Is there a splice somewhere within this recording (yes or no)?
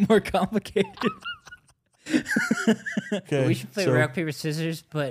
yes